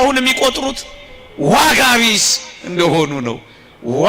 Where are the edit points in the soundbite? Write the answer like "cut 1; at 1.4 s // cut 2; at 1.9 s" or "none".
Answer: none